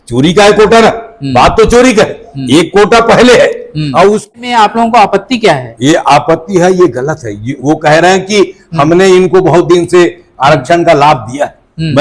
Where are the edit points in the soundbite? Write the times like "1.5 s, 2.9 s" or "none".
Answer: 4.3 s